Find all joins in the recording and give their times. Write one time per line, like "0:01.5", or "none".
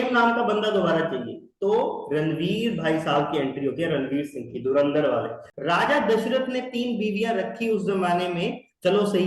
0:05.4